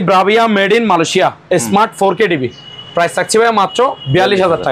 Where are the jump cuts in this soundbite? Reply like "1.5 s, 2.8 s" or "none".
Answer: none